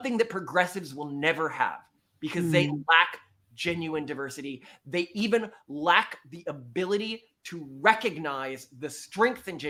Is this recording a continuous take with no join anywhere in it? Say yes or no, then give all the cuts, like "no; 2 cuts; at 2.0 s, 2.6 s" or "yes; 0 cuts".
yes; 0 cuts